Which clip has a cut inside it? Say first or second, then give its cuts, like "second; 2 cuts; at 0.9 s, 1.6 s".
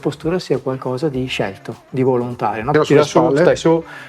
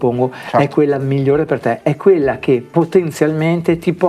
first; 1 cut; at 2.6 s